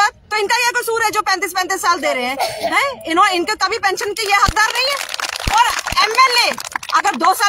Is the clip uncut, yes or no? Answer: yes